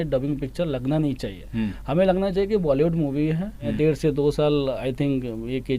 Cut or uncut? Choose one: cut